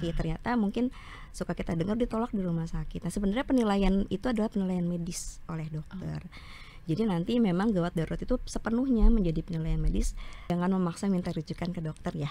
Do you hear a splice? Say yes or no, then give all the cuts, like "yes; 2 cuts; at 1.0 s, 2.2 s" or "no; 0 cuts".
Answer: yes; 1 cut; at 10.5 s